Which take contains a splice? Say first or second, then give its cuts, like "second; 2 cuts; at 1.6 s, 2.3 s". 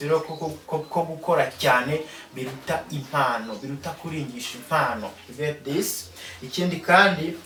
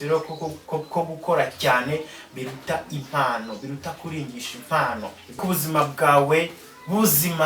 second; 1 cut; at 5.3 s